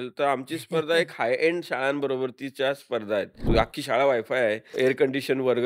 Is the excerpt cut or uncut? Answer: cut